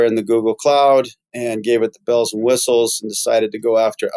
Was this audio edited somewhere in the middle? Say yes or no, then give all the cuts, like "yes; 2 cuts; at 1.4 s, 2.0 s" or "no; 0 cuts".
no; 0 cuts